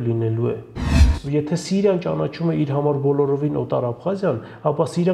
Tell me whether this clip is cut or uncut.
cut